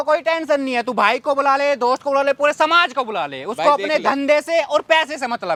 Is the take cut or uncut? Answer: uncut